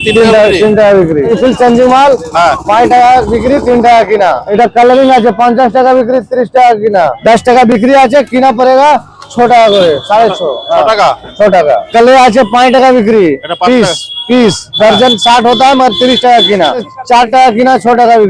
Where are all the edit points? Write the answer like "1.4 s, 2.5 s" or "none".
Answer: 1.3 s, 4.5 s, 7.2 s, 11.9 s, 16.9 s